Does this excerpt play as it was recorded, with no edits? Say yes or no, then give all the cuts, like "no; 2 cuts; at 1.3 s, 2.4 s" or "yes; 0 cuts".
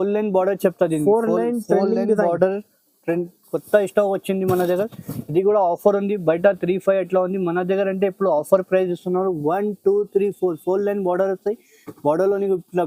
yes; 0 cuts